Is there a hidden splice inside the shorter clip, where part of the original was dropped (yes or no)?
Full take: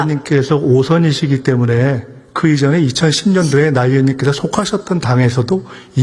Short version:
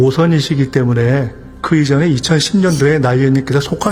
no